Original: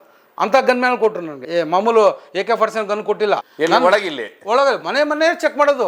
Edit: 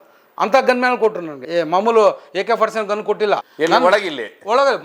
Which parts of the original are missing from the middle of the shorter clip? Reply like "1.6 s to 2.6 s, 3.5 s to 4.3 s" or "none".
none